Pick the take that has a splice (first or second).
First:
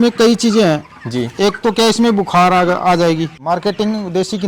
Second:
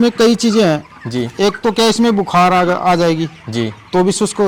first